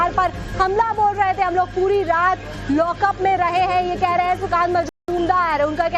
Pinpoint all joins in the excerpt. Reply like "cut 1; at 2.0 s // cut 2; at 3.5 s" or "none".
none